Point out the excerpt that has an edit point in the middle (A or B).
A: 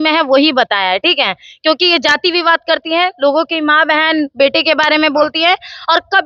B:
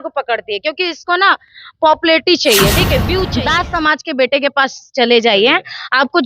B